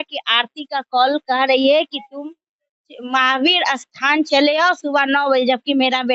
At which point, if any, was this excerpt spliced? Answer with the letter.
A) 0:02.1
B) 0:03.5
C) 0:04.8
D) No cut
D